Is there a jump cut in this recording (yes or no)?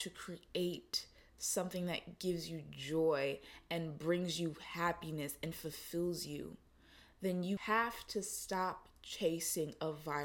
yes